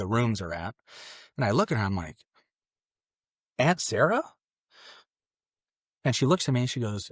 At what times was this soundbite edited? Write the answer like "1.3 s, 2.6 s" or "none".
none